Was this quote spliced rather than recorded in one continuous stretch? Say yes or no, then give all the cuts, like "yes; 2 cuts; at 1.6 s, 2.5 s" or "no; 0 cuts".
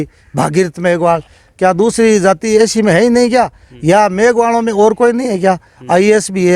no; 0 cuts